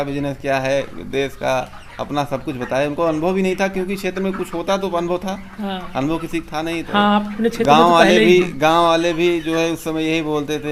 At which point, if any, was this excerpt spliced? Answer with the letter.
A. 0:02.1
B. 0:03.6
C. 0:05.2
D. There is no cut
D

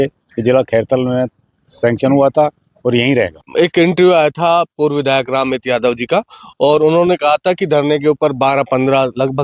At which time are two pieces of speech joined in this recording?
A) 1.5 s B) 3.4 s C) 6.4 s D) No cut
B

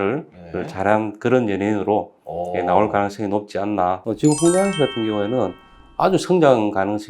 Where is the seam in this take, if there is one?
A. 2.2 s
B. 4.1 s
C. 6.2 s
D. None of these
B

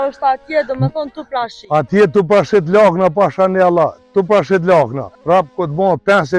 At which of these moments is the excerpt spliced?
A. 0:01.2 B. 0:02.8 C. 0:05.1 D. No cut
C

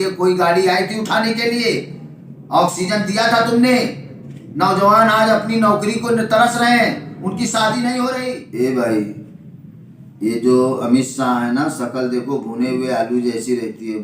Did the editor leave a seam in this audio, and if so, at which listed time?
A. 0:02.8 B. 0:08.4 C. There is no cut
B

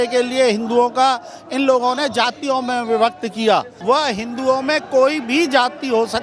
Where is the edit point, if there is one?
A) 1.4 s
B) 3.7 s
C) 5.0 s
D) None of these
B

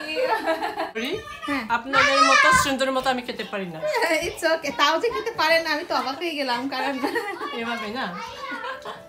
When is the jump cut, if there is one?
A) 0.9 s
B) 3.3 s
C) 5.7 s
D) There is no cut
A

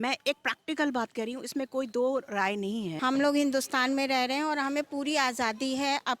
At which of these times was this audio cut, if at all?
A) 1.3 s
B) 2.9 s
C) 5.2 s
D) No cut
B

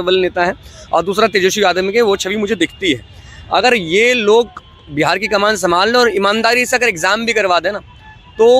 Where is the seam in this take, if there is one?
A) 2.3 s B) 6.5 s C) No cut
C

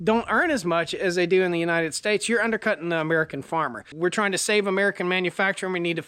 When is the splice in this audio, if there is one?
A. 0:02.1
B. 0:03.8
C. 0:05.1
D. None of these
B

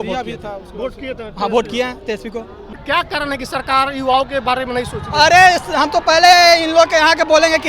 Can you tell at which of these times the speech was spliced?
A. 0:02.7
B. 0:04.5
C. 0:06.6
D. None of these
A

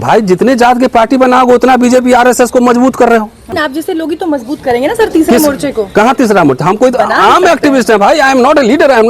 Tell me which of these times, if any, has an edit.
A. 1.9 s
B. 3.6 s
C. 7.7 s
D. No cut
B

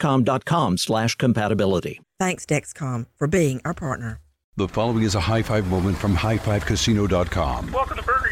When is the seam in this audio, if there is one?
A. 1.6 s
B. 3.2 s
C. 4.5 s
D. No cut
C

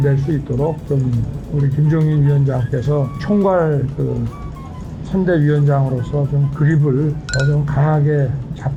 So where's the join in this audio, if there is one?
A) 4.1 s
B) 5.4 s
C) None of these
C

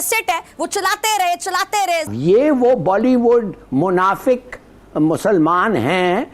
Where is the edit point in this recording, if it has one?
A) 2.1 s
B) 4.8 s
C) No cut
A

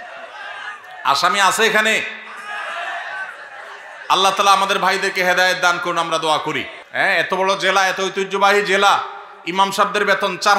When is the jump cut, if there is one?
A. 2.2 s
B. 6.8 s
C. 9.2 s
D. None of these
B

